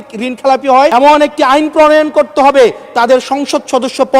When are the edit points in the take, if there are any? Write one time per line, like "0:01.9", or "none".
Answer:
0:00.9